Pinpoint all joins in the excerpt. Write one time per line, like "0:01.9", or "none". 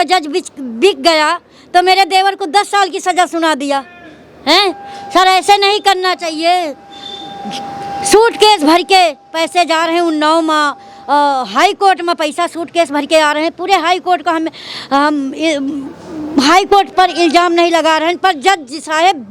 none